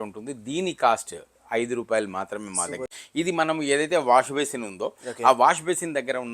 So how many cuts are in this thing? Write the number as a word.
one